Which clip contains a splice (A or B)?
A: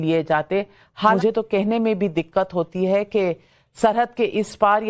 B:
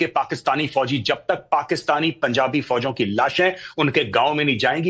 A